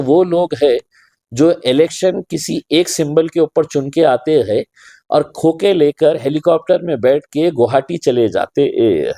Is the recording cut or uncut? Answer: uncut